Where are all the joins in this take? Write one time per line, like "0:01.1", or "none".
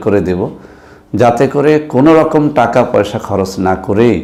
none